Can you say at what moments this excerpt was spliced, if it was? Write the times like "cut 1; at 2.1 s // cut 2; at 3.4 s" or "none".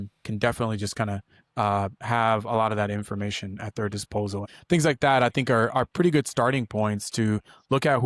cut 1; at 4.5 s

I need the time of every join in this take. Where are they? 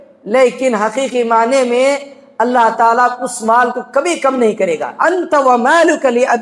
cut 1; at 4.9 s

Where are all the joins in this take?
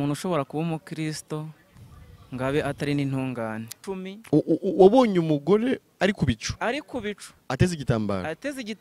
cut 1; at 3.7 s

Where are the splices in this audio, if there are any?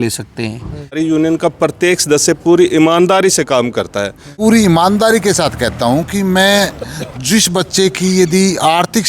cut 1; at 0.9 s // cut 2; at 4.4 s

